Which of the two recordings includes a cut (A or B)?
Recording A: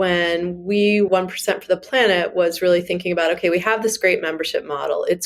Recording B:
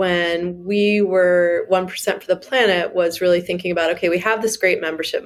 A